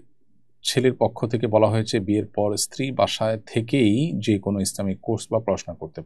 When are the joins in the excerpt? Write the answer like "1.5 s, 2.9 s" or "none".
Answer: none